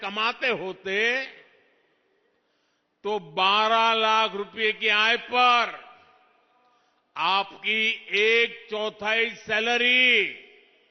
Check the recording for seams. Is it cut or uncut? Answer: uncut